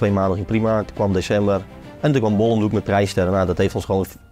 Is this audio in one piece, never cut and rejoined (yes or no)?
yes